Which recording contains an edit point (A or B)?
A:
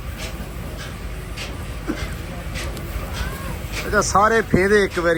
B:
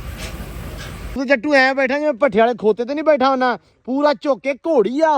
B